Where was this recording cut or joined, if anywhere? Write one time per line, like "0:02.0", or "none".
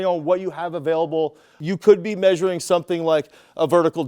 0:01.6